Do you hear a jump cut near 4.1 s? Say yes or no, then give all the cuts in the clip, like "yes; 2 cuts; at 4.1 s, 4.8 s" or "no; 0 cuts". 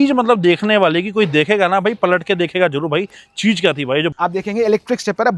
yes; 1 cut; at 4.1 s